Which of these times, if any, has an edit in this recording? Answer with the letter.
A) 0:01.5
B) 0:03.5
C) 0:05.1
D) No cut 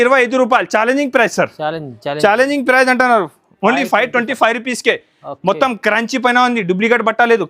D